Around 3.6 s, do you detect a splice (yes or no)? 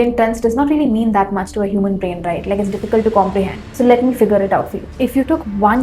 yes